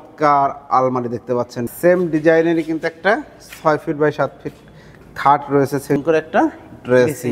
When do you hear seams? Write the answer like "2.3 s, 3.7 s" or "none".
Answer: 1.6 s, 6.0 s